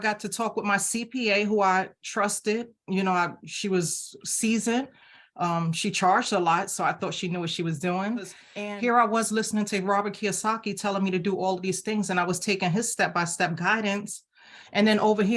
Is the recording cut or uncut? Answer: cut